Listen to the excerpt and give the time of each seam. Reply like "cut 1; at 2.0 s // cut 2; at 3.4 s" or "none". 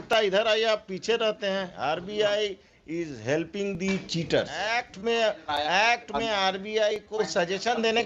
cut 1; at 1.7 s // cut 2; at 4.8 s